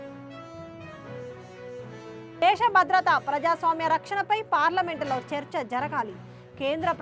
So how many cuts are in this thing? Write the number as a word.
one